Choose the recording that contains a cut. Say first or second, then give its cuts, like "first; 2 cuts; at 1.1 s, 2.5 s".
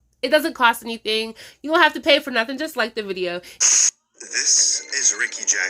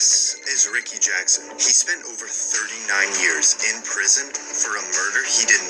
first; 1 cut; at 3.5 s